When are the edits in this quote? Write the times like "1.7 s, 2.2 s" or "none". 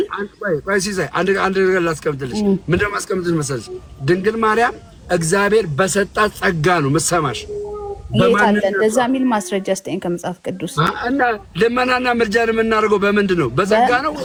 none